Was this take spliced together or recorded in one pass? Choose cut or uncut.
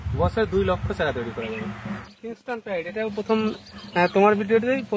cut